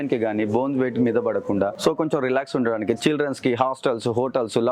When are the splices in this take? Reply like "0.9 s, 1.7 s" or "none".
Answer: none